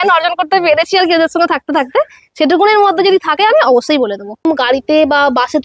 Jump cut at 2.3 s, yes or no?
no